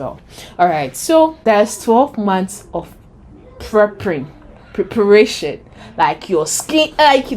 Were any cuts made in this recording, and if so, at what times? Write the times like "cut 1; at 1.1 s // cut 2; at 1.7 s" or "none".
cut 1; at 1.4 s